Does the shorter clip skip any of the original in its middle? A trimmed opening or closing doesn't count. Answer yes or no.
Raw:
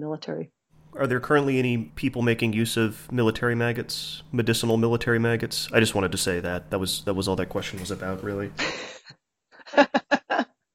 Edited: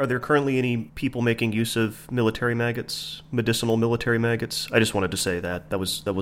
no